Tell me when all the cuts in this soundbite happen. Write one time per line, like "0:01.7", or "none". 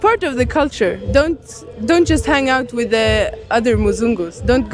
none